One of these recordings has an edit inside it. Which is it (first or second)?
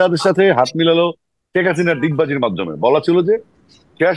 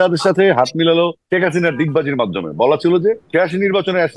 second